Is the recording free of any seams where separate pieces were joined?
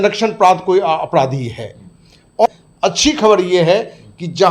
no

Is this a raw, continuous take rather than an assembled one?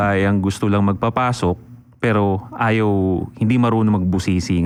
yes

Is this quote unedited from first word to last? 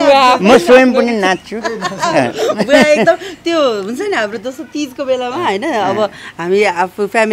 yes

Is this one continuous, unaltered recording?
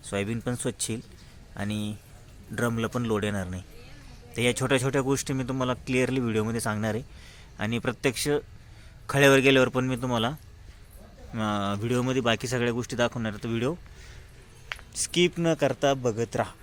yes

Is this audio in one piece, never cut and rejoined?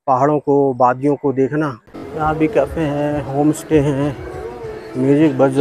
no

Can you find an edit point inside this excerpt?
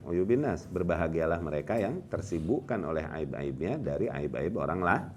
no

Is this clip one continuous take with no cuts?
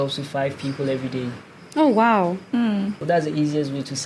no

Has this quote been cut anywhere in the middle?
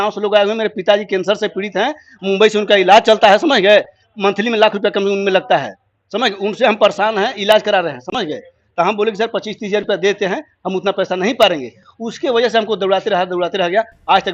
no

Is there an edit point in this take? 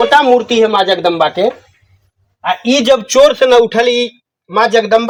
no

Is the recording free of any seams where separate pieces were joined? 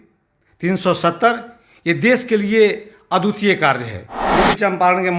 no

